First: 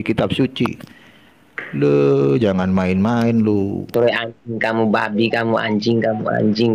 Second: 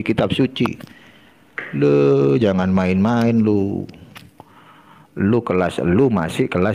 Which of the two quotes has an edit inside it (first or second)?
first